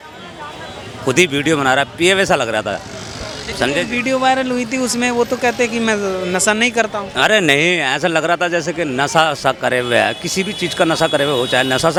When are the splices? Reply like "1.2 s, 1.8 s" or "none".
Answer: none